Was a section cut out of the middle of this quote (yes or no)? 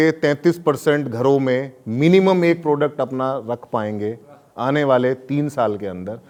no